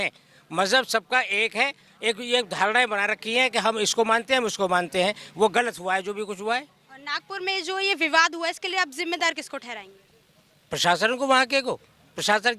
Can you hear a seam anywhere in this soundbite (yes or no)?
no